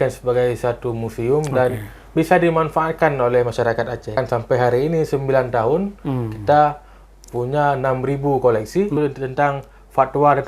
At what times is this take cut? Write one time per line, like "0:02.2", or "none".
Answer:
0:04.2
0:09.0